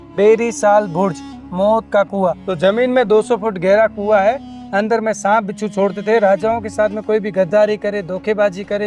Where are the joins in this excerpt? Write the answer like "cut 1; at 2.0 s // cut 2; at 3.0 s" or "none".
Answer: cut 1; at 2.4 s